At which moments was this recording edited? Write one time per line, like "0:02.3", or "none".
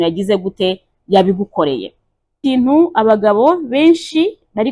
0:02.4